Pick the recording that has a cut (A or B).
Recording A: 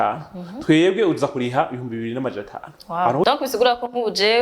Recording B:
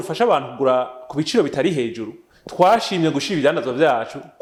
A